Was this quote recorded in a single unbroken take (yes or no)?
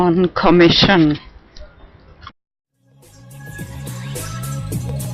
yes